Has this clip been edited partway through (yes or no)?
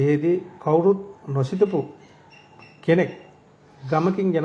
no